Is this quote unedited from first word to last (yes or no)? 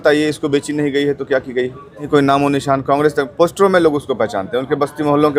no